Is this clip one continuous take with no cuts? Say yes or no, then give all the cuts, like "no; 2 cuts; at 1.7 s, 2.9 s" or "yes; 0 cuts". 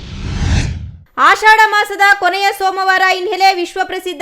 no; 1 cut; at 0.9 s